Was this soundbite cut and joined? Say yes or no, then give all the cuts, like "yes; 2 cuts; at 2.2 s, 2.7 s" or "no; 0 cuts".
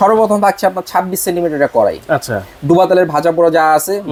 no; 0 cuts